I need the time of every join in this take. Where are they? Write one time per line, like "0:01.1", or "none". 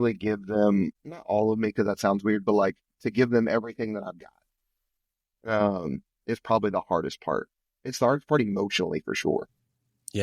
0:01.1